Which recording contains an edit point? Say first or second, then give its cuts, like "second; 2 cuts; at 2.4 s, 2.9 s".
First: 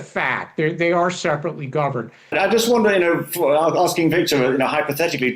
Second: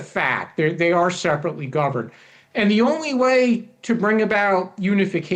first; 1 cut; at 2.4 s